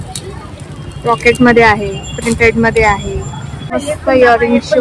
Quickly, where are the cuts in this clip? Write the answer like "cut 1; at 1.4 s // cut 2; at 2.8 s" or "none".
cut 1; at 3.8 s